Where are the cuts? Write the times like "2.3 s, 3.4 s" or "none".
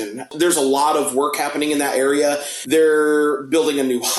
2.5 s